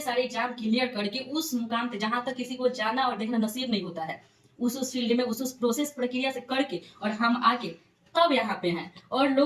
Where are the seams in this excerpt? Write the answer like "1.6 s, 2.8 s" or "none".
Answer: none

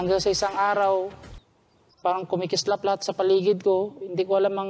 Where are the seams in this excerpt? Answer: 1.2 s

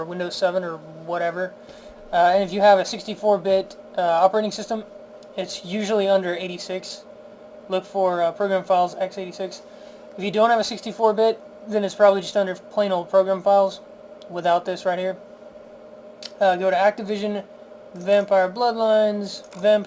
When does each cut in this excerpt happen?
14.8 s

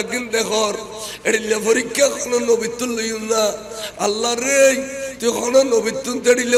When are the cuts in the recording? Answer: none

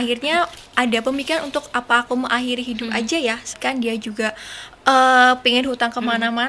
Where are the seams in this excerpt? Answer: 3.6 s

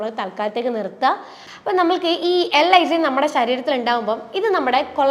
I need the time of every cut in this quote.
1.4 s

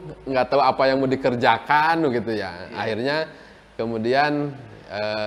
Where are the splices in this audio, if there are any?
none

